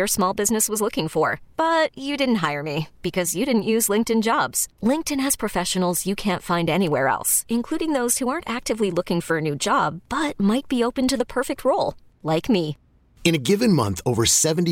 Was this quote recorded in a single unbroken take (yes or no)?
yes